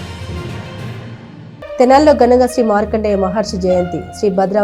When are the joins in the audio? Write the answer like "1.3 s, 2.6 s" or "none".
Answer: 1.4 s